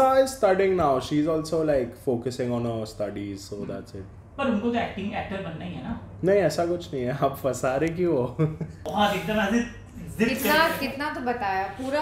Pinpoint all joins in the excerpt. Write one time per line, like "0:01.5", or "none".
0:08.8